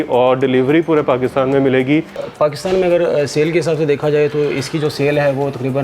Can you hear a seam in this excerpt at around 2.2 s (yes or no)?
yes